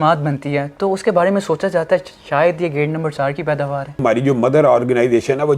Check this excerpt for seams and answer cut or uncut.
cut